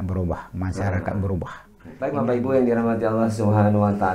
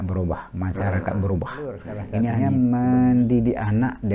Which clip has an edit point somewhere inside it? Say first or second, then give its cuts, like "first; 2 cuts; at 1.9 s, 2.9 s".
second; 1 cut; at 2.1 s